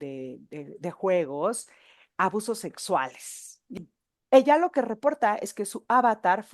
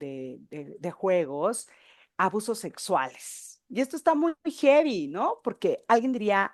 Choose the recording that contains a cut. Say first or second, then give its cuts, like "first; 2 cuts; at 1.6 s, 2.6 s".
first; 1 cut; at 3.7 s